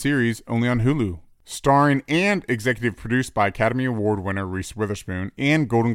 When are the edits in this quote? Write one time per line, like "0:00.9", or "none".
0:01.3